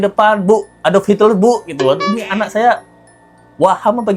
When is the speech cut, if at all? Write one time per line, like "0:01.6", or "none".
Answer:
none